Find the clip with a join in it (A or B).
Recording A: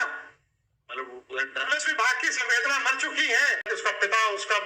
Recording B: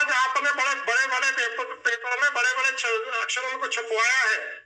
A